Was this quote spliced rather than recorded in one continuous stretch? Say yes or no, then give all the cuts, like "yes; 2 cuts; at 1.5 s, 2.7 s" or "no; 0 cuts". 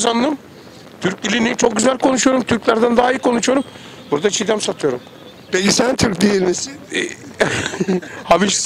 no; 0 cuts